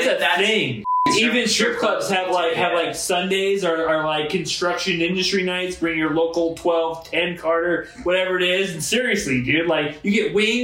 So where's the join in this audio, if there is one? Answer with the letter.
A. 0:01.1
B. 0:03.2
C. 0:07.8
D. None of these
A